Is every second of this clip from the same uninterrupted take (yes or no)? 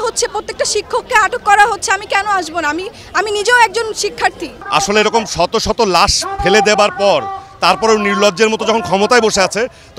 no